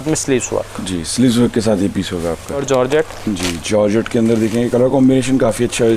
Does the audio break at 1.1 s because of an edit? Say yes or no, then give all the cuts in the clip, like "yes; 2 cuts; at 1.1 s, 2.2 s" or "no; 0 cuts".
no; 1 cut; at 2.6 s